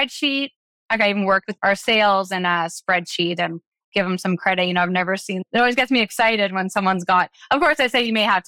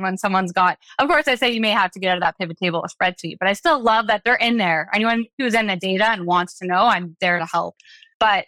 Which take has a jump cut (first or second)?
first